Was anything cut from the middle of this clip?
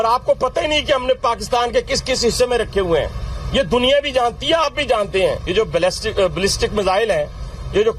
yes; 1 cut; at 5.4 s

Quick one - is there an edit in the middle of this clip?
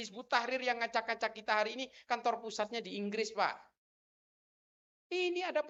no; 0 cuts

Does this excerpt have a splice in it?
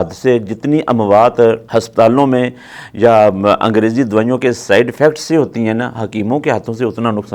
yes; 1 cut; at 1.6 s

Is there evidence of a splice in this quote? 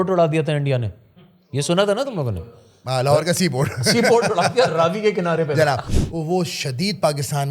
yes; 1 cut; at 5.9 s

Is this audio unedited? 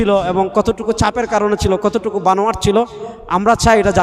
yes; 0 cuts

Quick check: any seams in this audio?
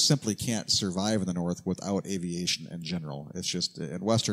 no; 0 cuts

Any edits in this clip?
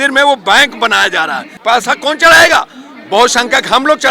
yes; 1 cut; at 1.5 s

